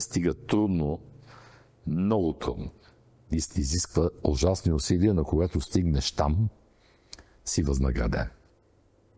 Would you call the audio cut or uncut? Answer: uncut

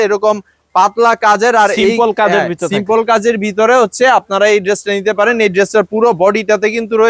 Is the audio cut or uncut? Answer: uncut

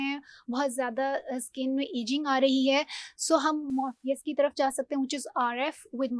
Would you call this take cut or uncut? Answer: uncut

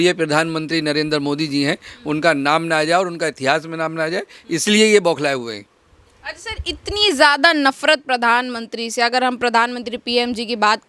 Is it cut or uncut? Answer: uncut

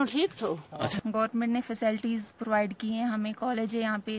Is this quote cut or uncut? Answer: cut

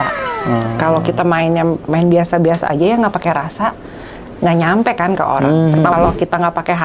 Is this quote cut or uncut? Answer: cut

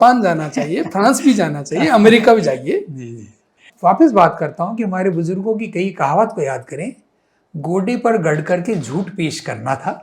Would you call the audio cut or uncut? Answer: cut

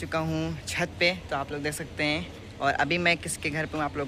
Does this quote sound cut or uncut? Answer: uncut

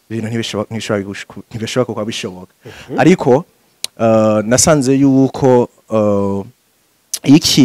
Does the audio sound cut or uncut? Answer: uncut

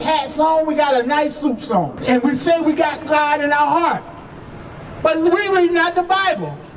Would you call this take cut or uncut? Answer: cut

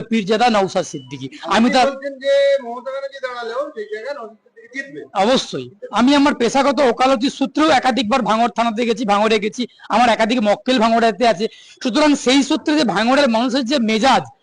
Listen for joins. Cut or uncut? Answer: cut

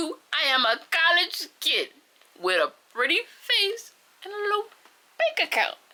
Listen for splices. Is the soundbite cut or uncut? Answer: uncut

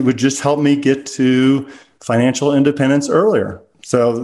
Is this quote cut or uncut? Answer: uncut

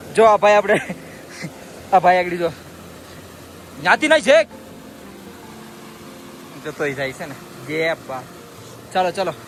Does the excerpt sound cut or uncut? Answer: uncut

